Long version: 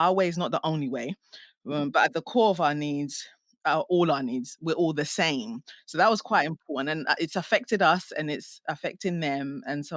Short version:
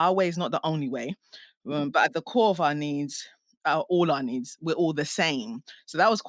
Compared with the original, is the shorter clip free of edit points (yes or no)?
yes